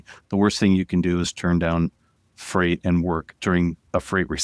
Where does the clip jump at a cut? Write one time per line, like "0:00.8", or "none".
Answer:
0:03.3